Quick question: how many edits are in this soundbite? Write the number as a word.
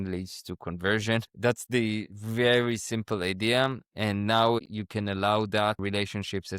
two